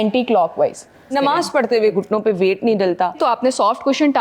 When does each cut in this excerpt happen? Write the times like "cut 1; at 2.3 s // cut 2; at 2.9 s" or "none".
cut 1; at 1.9 s // cut 2; at 3.2 s

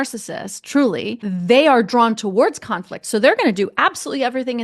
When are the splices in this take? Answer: cut 1; at 1.2 s

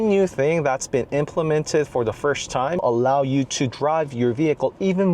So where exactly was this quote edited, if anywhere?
cut 1; at 2.8 s

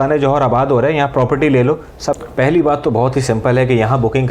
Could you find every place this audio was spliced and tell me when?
cut 1; at 2.2 s

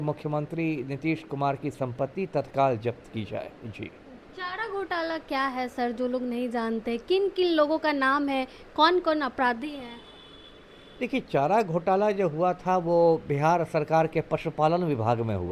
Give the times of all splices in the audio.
none

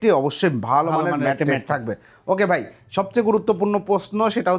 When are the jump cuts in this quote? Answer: none

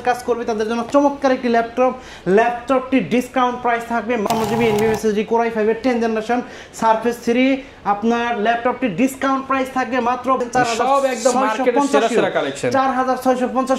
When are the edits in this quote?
cut 1; at 4.2 s // cut 2; at 10.4 s

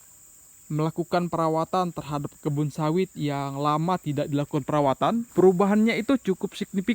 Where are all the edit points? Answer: cut 1; at 5.3 s

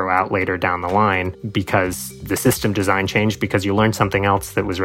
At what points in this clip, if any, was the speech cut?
cut 1; at 1.4 s

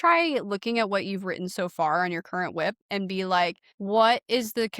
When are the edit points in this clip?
cut 1; at 3.7 s

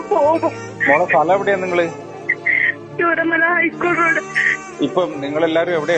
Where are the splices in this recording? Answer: none

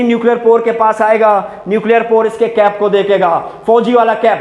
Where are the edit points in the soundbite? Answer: none

